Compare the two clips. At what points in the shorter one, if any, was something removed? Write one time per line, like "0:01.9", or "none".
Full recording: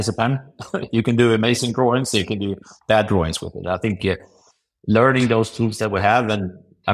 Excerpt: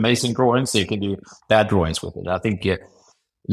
none